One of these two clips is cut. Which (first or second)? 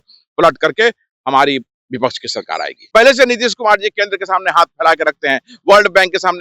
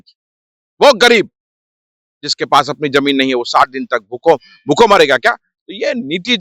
first